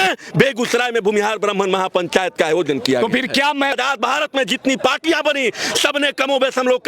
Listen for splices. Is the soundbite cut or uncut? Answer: cut